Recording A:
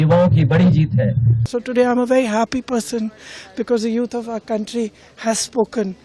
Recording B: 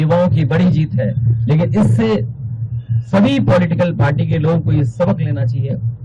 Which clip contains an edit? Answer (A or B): A